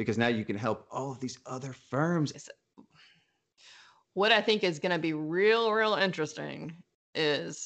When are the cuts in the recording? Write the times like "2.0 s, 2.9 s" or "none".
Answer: 2.3 s